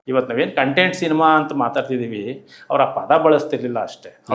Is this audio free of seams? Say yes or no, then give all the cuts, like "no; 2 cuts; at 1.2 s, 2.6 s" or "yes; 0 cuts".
yes; 0 cuts